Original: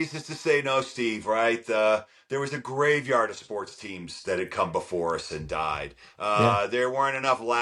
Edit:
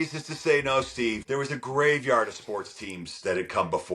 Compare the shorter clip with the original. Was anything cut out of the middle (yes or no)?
yes